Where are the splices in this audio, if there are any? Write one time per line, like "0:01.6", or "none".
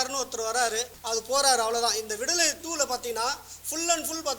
0:00.9

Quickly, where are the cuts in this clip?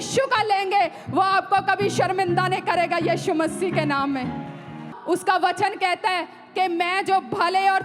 0:05.0

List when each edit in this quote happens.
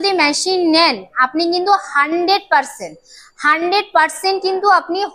none

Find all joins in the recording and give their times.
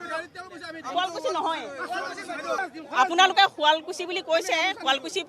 0:02.6

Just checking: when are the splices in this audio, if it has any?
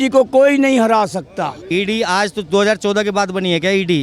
0:01.6

